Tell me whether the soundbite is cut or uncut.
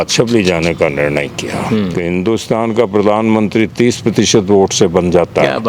cut